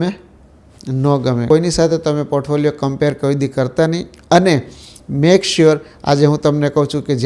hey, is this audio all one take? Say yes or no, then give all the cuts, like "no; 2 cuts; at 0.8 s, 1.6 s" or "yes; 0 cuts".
no; 1 cut; at 1.5 s